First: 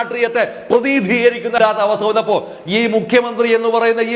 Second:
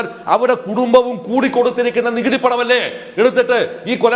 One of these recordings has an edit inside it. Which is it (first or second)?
first